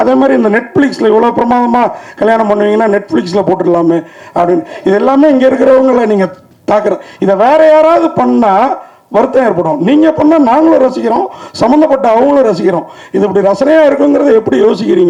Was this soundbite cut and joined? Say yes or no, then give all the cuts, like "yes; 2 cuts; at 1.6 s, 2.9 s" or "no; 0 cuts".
no; 0 cuts